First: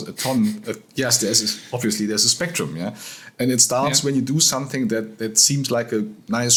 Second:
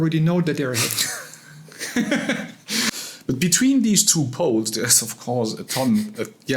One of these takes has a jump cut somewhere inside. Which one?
second; 1 cut; at 2.9 s

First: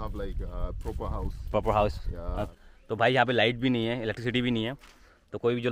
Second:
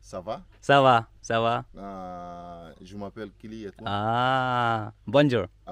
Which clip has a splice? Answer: first; 1 cut; at 2.5 s

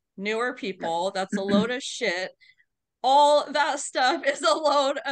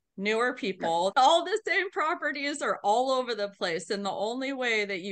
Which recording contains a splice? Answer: second; 1 cut; at 1.1 s

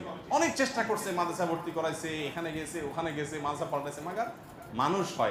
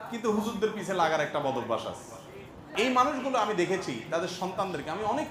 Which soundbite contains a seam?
second; 1 cut; at 2.6 s

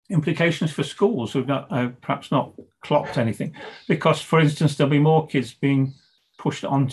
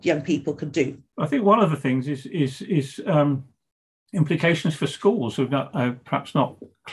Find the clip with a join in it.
second; 1 cut; at 1.0 s

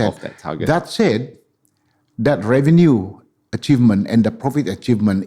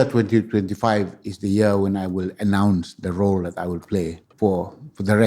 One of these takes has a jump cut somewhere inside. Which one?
second; 1 cut; at 4.2 s

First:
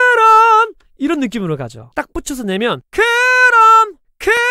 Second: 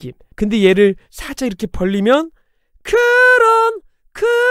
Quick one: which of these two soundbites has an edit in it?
first; 1 cut; at 1.8 s

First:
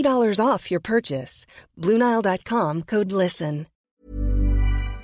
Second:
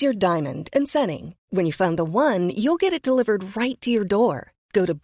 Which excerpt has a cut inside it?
first; 1 cut; at 3.9 s

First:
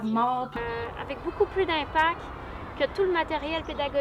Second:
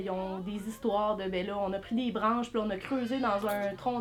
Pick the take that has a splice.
first; 1 cut; at 0.9 s

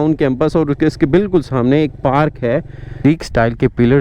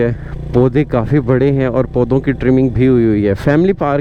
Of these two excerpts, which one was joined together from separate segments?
first; 1 cut; at 3.0 s

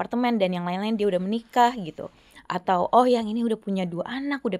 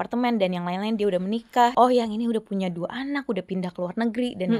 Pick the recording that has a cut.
second; 1 cut; at 1.7 s

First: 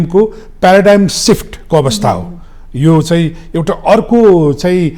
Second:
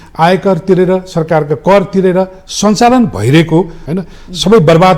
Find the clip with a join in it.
second; 1 cut; at 3.8 s

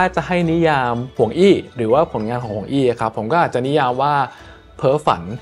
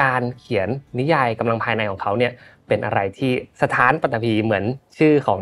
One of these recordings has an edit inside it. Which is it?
first; 1 cut; at 1.0 s

